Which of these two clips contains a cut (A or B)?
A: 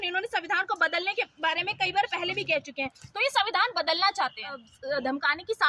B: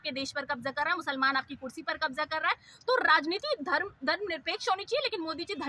A